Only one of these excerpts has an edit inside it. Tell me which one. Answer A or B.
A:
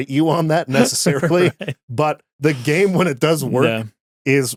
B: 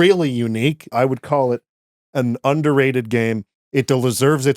B